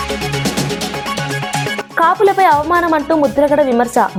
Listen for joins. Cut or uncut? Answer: uncut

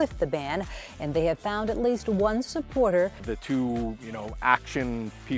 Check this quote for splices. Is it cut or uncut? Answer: uncut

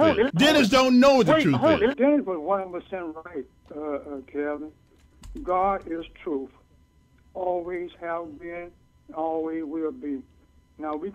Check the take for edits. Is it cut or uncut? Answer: cut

